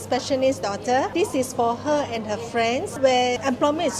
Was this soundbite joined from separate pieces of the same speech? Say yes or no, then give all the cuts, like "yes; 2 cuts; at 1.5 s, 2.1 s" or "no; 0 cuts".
yes; 2 cuts; at 1.1 s, 3.0 s